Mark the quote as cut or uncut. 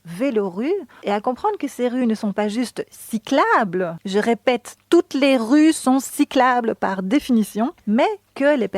cut